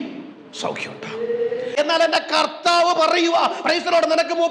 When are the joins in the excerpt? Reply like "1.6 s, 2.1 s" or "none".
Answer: 1.7 s